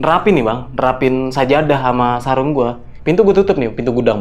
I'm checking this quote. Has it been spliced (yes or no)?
yes